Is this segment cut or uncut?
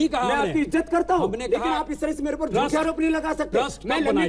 uncut